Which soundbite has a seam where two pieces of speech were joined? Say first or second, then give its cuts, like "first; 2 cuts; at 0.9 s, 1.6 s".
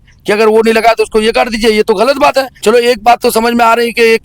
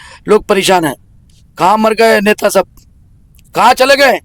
first; 1 cut; at 2.5 s